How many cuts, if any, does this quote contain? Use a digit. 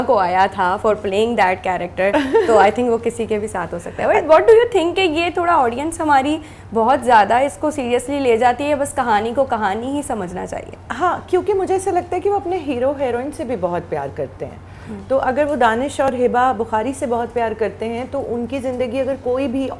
0